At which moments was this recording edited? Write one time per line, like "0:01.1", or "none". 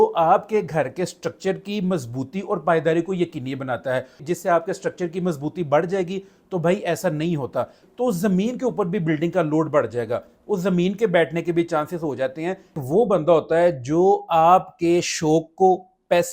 0:04.3
0:07.8
0:12.8